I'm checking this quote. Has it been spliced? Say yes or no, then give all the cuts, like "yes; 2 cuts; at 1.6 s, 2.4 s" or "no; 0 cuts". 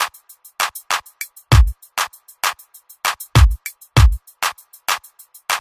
no; 0 cuts